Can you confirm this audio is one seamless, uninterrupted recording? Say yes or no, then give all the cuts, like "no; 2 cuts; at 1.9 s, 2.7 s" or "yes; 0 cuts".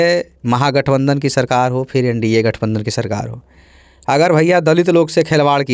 yes; 0 cuts